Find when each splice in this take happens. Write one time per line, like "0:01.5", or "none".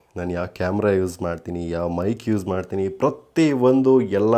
none